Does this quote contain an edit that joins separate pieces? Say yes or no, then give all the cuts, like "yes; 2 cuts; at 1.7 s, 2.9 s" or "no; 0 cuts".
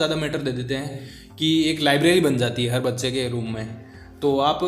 no; 0 cuts